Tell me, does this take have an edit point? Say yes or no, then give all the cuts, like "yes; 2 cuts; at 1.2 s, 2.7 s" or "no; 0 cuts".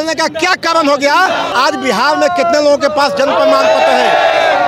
yes; 1 cut; at 1.5 s